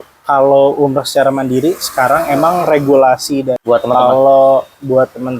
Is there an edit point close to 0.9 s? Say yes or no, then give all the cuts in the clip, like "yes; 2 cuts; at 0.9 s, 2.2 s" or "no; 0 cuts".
no; 1 cut; at 3.6 s